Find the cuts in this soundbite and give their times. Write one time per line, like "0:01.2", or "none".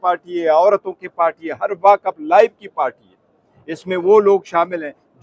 none